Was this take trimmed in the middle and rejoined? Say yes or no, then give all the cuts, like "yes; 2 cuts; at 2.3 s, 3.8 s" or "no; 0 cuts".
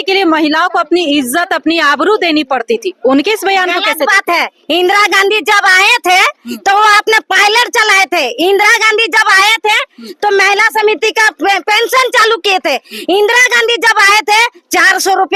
no; 0 cuts